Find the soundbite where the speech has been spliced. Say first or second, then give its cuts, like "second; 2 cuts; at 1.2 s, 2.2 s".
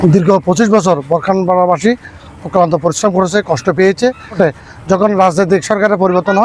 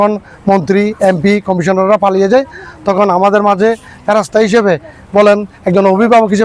first; 1 cut; at 4.4 s